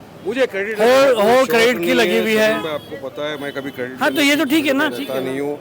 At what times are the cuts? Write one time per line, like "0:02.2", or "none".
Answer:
none